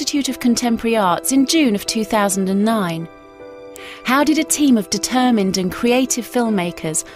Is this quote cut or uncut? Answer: uncut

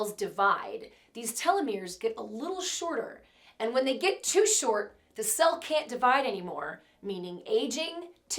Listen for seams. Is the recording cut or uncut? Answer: uncut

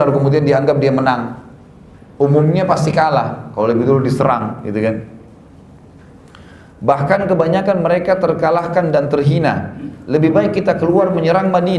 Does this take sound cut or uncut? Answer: uncut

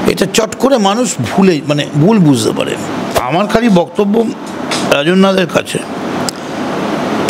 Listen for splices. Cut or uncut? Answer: cut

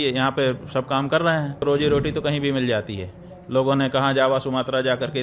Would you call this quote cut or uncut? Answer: cut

